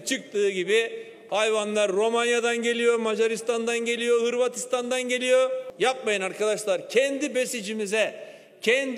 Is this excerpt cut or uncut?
cut